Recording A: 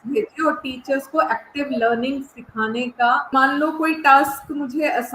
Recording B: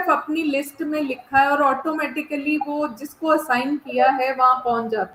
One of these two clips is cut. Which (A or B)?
A